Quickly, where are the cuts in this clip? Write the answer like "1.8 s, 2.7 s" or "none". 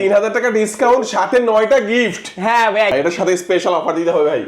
2.9 s